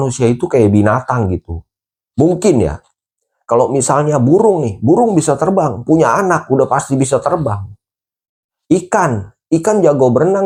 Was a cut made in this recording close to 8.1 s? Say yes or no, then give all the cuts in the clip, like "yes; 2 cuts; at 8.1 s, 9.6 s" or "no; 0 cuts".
no; 0 cuts